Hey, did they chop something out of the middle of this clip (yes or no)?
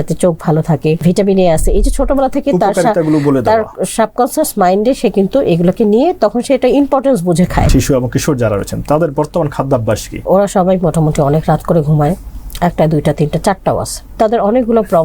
yes